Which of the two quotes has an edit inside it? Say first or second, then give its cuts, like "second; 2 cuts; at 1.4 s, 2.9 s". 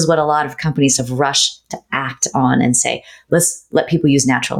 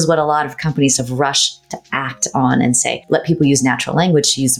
second; 1 cut; at 3.0 s